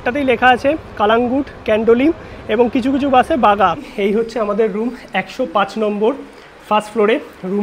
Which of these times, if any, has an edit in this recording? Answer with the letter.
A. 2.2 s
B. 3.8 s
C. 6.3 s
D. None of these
B